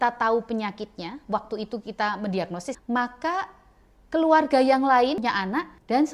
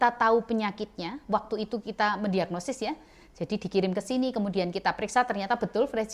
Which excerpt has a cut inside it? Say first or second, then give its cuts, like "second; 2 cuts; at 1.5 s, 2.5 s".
first; 2 cuts; at 2.8 s, 5.2 s